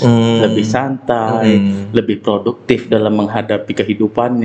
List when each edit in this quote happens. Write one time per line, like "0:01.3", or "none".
none